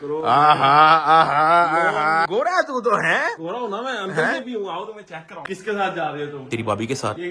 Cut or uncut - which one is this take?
cut